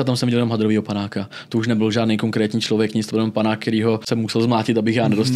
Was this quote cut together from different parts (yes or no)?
yes